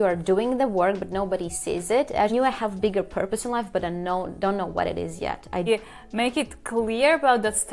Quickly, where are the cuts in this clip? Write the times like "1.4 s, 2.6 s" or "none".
2.3 s, 5.7 s